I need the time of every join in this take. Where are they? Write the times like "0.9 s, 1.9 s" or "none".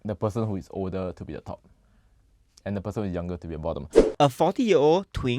3.8 s